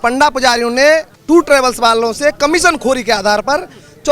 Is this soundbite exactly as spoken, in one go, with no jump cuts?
no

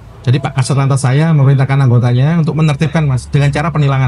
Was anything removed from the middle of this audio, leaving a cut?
no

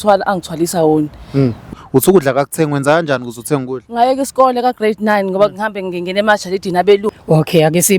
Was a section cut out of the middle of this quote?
yes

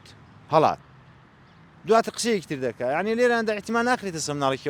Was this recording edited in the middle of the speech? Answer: no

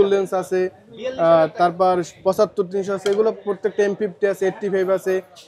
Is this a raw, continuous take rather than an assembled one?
yes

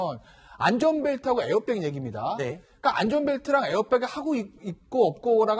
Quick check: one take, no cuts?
yes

